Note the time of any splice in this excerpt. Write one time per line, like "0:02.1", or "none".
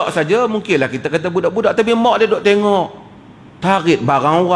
none